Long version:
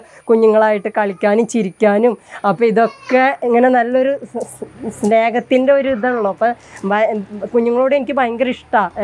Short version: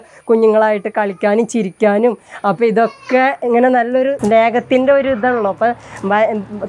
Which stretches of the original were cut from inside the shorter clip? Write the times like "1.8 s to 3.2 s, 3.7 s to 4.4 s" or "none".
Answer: 4.2 s to 5.0 s

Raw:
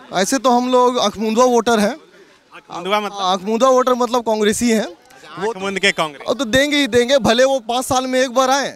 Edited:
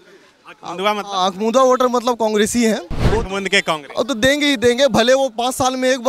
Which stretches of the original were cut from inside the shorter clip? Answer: 5.0 s to 5.2 s

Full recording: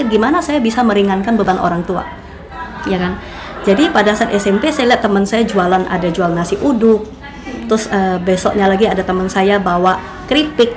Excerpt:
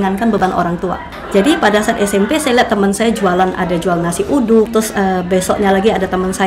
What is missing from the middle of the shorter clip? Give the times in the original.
2.2 s to 3.4 s, 7.0 s to 7.6 s

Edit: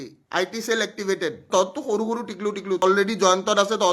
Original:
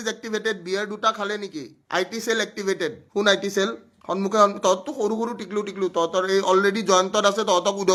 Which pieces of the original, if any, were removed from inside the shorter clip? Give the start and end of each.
3.0 s to 4.6 s, 5.9 s to 6.5 s

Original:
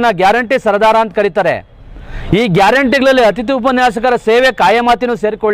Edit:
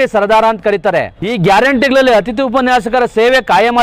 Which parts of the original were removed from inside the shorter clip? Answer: 1.7 s to 2.3 s

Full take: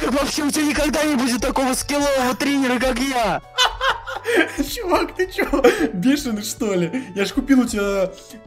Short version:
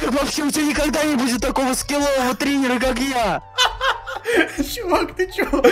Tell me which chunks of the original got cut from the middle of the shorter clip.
none

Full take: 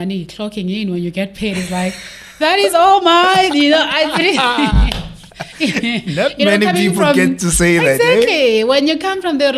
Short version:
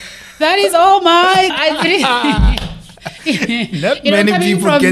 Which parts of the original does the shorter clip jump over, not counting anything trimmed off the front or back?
3.5 s to 3.9 s

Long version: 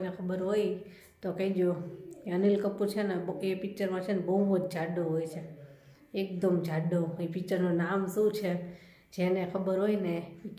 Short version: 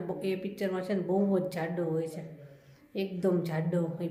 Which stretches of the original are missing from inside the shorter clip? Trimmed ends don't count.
none

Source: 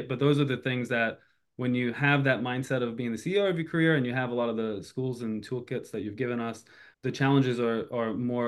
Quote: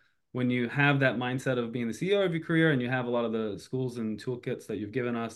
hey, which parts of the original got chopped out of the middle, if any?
none

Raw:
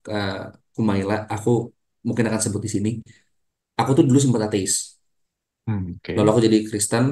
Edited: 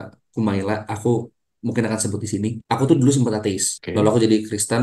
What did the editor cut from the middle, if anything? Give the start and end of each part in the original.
3.0 s to 3.7 s, 4.8 s to 6.0 s

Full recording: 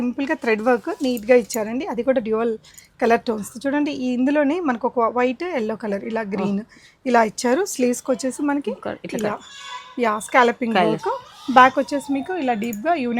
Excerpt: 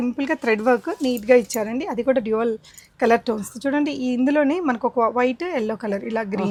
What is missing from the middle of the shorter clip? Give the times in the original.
none

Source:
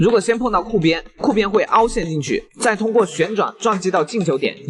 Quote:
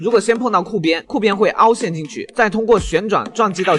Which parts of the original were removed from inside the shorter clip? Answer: 1.1 s to 1.2 s, 2.4 s to 2.5 s

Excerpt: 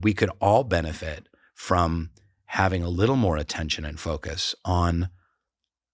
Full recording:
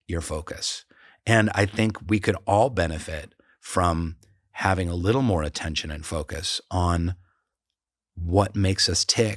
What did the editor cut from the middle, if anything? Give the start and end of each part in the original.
none

